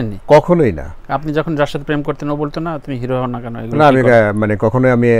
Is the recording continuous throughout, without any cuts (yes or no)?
yes